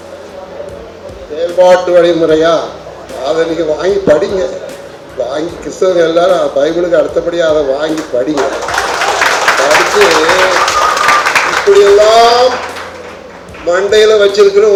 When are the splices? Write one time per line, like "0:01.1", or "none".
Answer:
none